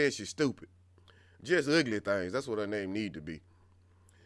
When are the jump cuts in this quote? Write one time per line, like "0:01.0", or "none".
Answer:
none